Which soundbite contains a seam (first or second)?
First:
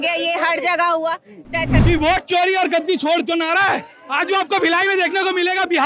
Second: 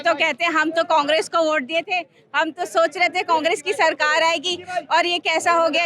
first